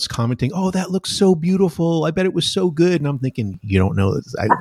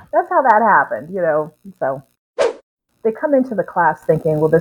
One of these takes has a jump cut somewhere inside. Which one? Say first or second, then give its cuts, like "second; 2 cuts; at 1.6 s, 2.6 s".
second; 1 cut; at 2.4 s